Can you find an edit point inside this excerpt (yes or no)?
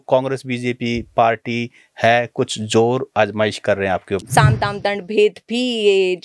yes